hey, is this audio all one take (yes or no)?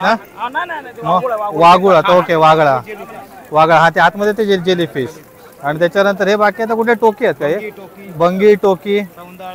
yes